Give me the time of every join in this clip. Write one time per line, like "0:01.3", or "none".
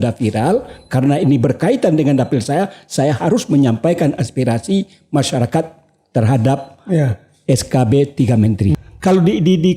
0:08.8